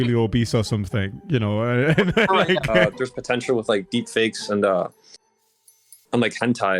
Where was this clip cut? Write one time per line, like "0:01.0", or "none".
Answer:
0:02.7